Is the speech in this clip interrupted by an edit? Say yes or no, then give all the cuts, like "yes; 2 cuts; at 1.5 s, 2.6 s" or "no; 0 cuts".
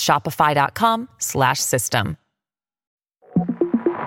yes; 1 cut; at 3.2 s